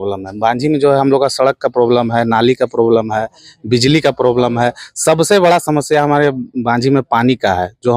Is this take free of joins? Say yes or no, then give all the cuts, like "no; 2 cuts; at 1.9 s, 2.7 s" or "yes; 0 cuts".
yes; 0 cuts